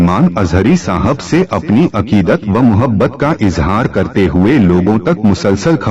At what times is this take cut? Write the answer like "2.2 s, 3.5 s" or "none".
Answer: none

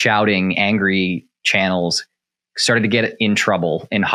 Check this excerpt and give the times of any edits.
none

